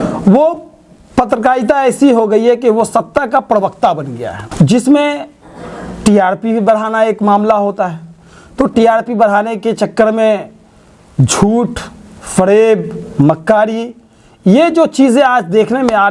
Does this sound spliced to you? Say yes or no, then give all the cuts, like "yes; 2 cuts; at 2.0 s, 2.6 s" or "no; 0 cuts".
no; 0 cuts